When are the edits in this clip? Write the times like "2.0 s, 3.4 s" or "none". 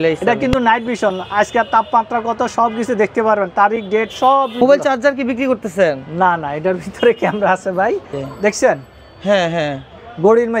4.6 s, 8.1 s